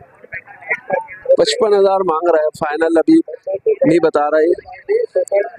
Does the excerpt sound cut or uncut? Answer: uncut